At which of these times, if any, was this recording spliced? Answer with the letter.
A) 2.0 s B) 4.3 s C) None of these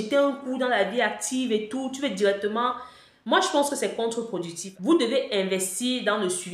B